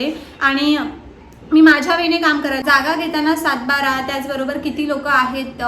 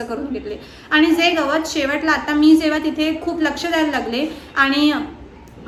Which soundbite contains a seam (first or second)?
first